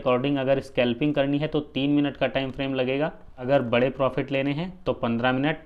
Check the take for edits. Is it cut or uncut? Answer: cut